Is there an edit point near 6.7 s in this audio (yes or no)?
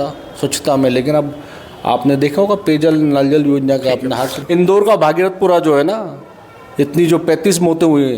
no